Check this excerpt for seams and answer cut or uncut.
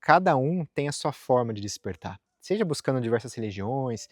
uncut